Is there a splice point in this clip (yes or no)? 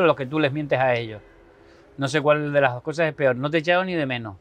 no